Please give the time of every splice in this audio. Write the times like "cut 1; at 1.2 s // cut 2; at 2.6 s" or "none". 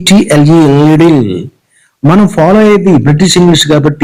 none

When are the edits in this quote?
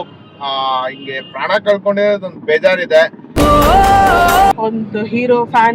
cut 1; at 4.5 s

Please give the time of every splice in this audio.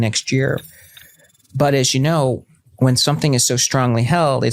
none

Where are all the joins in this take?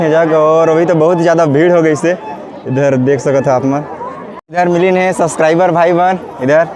cut 1; at 4.3 s

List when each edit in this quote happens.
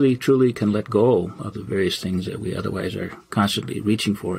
none

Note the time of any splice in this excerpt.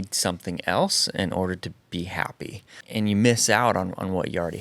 cut 1; at 2.8 s

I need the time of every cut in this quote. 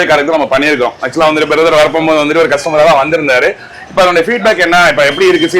none

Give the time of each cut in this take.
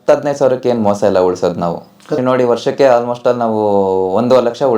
cut 1; at 2.0 s

